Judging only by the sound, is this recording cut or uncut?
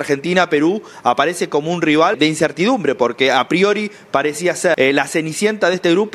cut